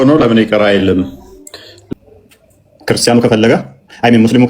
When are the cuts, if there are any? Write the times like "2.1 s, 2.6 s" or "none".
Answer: 1.9 s